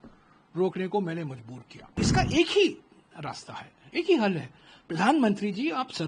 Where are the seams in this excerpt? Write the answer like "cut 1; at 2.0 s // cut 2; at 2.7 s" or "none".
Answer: cut 1; at 2.0 s